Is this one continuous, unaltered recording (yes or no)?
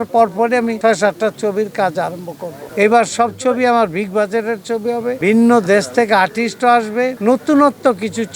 yes